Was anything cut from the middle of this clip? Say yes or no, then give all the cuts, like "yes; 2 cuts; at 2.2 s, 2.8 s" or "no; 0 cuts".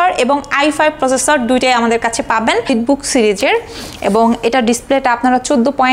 yes; 1 cut; at 2.7 s